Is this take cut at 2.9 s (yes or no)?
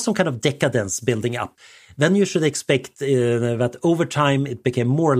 no